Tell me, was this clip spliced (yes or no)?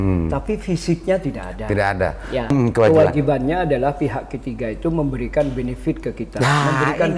yes